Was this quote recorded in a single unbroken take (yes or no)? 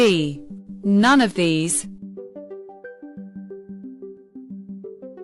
yes